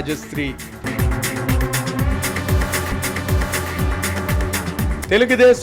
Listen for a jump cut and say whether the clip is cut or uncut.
uncut